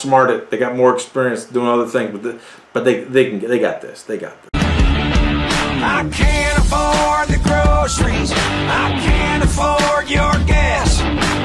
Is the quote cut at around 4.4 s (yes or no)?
yes